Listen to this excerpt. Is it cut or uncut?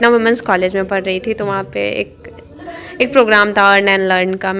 uncut